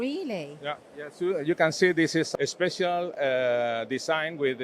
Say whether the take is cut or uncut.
cut